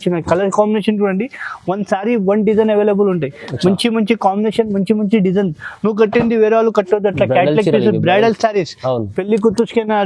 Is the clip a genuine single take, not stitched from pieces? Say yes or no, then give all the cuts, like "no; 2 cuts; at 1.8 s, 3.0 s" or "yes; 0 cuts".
yes; 0 cuts